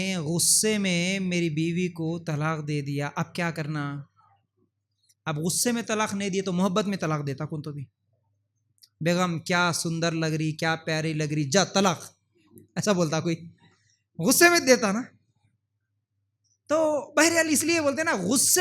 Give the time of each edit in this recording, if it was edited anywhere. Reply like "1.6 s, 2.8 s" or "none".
none